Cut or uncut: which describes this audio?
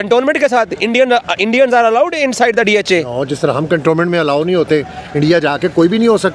uncut